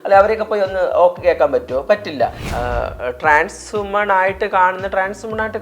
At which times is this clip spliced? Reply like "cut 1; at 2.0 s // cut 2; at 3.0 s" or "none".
cut 1; at 2.4 s